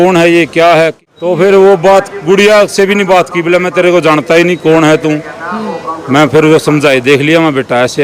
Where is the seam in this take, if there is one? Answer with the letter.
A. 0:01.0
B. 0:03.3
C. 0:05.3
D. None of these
A